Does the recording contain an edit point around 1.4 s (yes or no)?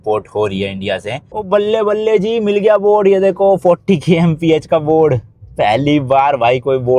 yes